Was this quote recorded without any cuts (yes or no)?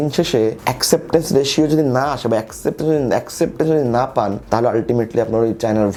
yes